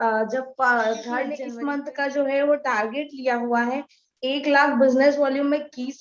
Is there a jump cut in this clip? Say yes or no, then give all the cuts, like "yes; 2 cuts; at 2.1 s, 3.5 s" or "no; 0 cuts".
yes; 1 cut; at 1.5 s